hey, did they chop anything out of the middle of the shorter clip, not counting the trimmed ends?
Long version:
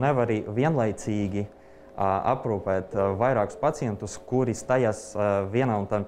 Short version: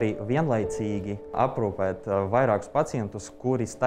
yes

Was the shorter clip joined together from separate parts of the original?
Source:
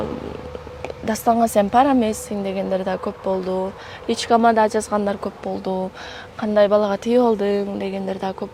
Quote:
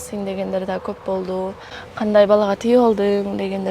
yes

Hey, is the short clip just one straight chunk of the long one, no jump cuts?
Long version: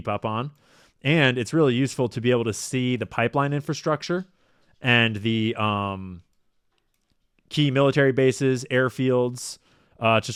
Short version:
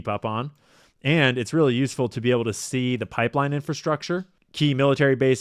no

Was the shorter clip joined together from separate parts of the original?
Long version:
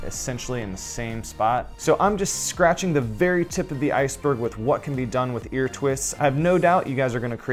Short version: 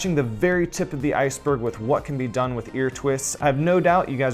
no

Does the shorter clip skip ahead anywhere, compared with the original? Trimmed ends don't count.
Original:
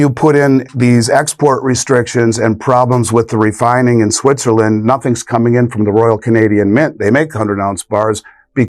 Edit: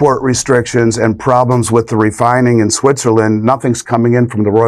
no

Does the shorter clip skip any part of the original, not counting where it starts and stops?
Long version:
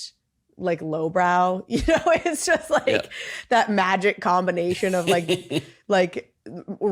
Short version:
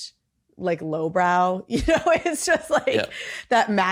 no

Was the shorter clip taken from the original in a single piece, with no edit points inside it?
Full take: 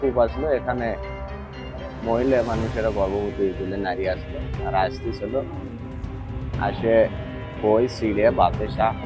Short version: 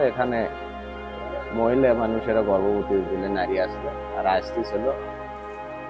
yes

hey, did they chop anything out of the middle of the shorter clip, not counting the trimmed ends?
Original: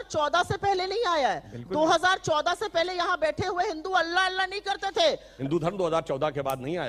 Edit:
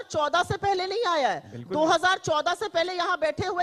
no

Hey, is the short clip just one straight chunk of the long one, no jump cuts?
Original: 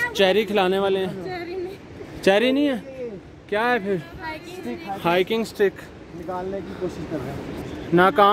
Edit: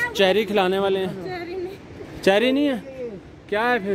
yes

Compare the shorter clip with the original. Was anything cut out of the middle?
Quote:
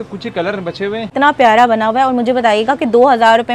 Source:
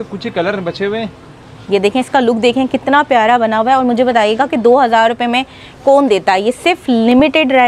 yes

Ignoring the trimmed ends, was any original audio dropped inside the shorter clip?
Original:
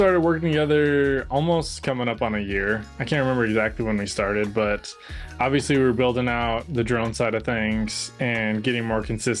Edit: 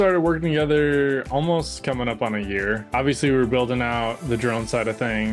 yes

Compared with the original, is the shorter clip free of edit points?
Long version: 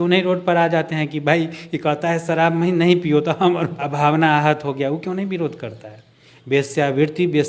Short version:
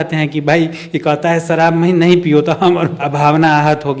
yes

